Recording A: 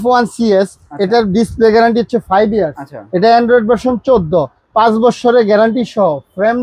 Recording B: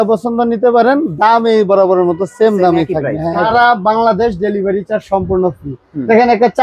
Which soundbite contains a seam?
B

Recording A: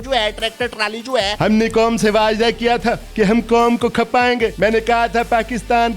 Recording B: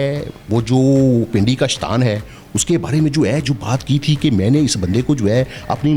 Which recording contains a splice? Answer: A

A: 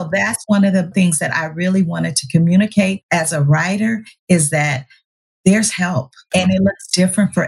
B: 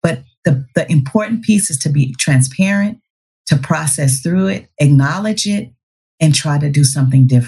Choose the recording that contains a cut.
A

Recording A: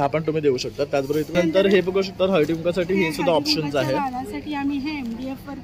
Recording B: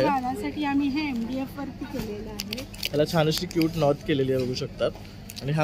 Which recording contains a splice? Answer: A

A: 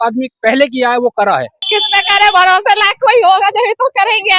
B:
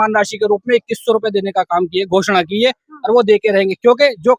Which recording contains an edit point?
A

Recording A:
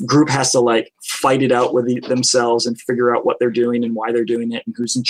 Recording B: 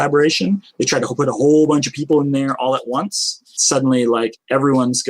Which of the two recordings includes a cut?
B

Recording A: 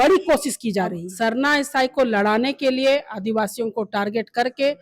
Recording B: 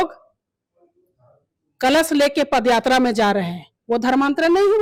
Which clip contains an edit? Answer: A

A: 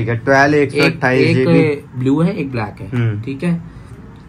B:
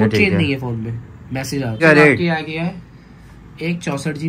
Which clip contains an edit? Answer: B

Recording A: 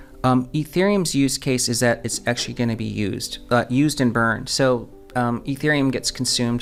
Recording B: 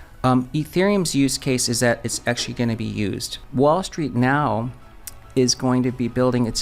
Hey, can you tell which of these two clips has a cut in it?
B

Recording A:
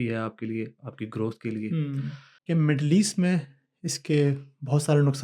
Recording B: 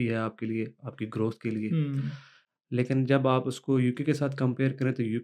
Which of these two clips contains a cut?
A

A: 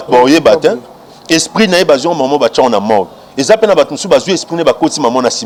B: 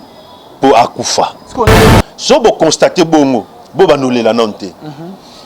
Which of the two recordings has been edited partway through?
B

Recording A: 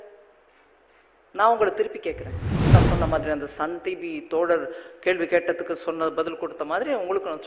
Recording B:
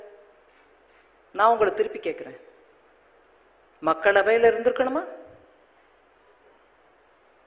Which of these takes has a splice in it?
A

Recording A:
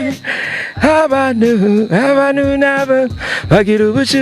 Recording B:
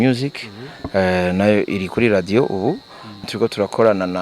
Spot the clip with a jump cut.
B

